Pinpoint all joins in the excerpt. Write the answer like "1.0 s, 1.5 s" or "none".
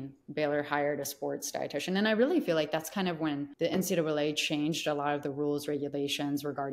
3.5 s